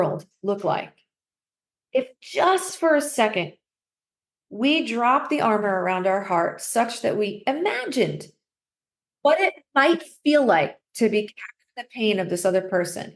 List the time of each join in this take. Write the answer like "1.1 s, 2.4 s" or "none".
none